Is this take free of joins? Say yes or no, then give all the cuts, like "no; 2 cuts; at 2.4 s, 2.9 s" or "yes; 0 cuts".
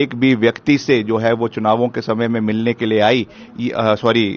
yes; 0 cuts